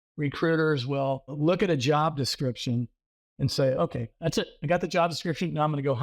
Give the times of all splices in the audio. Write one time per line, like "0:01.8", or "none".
0:01.3
0:04.1